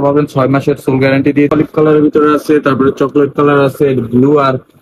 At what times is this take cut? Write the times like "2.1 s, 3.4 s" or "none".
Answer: 1.5 s